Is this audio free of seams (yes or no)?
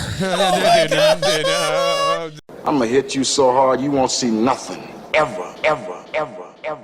no